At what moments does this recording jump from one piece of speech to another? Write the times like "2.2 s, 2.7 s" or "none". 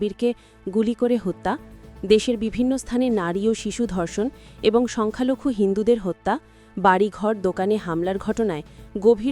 none